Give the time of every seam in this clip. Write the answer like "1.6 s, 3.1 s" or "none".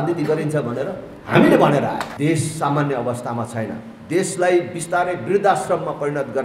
2.1 s